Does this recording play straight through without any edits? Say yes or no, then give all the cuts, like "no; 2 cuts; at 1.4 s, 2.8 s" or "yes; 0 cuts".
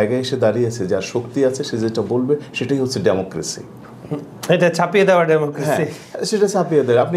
yes; 0 cuts